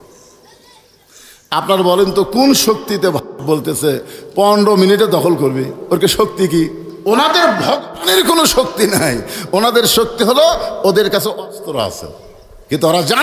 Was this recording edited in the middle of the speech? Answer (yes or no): yes